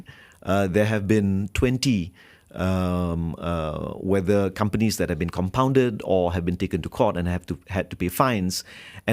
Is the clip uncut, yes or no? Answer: yes